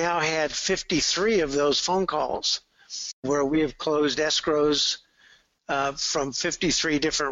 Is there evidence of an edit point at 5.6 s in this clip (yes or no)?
no